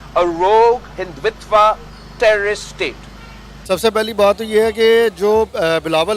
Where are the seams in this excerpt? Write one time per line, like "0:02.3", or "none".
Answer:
0:03.5